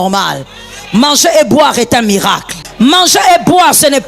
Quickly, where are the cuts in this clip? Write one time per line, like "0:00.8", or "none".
0:02.6